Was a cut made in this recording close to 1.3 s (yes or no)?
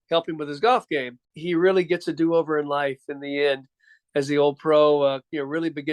yes